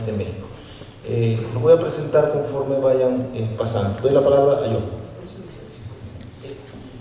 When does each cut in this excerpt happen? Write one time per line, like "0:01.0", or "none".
0:05.5